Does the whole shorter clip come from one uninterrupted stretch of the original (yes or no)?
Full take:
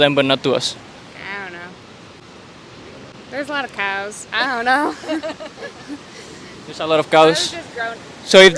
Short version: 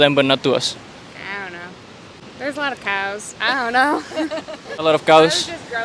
no